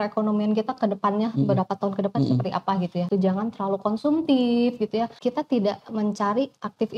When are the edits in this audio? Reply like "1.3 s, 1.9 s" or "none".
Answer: 3.1 s, 5.1 s